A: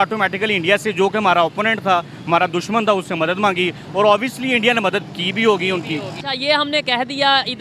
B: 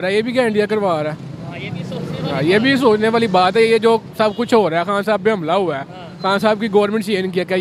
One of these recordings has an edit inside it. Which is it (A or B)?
A